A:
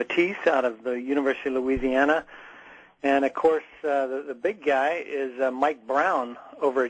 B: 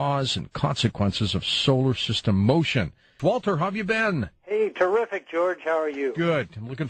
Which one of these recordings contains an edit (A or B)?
A